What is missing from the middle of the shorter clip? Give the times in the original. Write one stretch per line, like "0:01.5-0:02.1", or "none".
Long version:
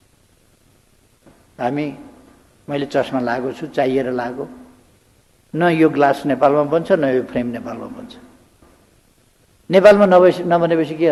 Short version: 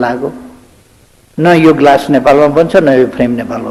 none